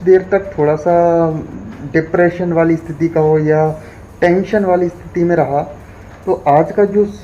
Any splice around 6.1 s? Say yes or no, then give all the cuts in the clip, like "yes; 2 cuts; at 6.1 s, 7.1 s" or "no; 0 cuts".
yes; 1 cut; at 6.1 s